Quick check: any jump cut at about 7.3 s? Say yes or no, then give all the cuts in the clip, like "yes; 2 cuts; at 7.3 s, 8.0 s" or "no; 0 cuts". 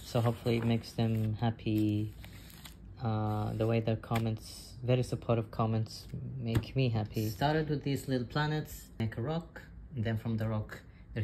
yes; 2 cuts; at 7.3 s, 9.0 s